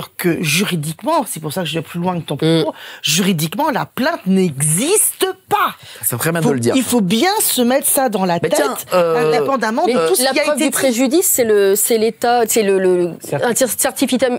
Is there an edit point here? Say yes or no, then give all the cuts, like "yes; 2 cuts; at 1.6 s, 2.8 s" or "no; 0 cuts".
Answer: no; 0 cuts